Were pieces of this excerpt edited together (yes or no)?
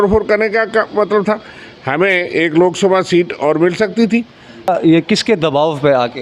yes